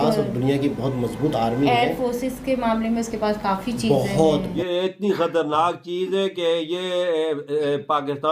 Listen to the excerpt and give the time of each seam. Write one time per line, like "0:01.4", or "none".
0:04.5